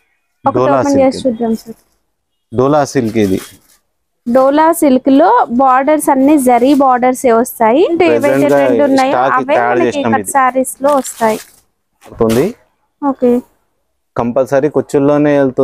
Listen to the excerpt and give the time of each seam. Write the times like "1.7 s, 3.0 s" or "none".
7.9 s, 12.1 s